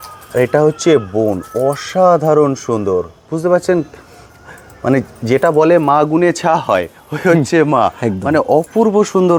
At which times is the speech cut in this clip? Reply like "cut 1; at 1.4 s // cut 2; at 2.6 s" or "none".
none